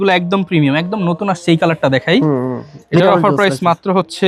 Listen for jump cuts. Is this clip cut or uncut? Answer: uncut